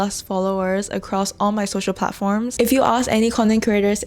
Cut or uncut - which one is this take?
cut